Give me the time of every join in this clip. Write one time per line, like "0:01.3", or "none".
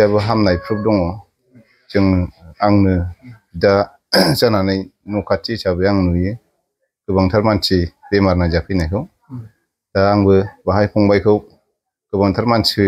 none